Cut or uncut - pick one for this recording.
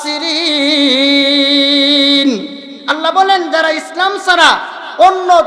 uncut